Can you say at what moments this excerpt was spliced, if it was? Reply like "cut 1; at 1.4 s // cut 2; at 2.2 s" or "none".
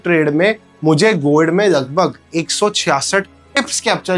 none